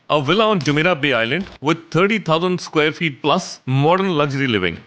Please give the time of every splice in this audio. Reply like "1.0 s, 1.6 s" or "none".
3.6 s